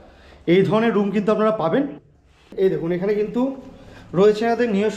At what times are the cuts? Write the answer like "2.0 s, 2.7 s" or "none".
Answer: 2.0 s